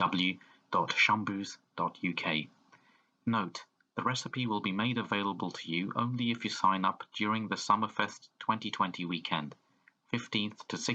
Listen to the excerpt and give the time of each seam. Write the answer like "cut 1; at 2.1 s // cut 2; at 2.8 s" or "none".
none